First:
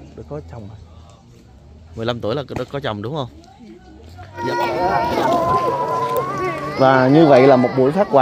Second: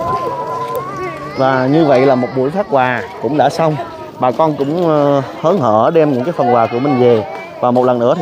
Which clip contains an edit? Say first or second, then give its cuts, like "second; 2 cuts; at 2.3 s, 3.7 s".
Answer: first; 1 cut; at 4.4 s